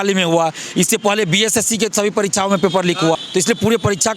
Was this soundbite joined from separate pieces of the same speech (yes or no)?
yes